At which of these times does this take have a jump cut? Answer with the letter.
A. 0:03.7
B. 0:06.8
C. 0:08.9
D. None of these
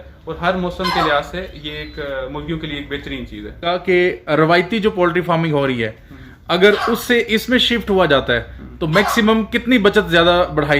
A